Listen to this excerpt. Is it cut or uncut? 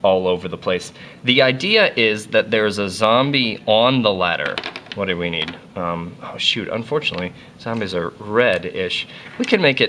cut